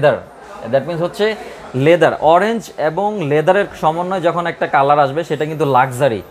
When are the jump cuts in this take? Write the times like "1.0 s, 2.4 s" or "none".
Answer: none